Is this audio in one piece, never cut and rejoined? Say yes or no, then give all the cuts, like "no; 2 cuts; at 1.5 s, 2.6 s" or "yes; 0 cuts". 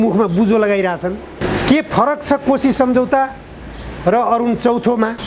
no; 1 cut; at 1.4 s